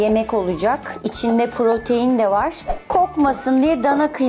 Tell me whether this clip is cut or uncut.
cut